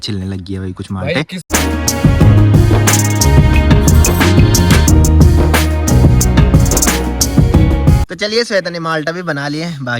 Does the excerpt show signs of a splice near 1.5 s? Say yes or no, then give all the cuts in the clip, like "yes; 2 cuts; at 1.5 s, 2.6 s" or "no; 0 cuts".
no; 0 cuts